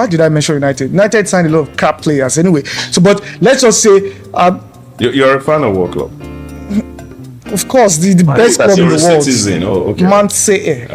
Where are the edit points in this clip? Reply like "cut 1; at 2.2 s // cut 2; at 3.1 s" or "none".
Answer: none